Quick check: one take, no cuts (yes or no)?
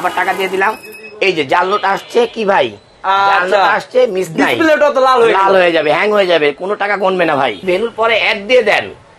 no